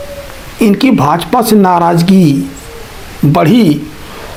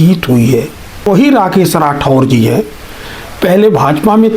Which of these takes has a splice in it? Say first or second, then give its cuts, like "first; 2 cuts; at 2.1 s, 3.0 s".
second; 1 cut; at 1.1 s